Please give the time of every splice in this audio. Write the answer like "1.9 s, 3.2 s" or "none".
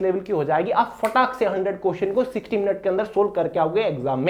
none